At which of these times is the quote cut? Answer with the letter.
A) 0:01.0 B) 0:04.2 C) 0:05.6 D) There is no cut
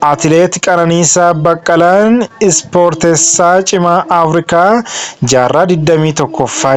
D